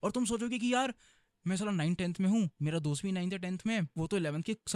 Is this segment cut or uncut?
cut